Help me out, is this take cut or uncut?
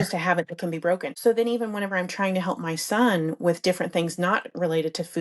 cut